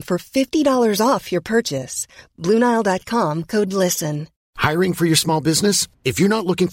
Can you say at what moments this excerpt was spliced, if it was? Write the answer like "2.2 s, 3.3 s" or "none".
4.3 s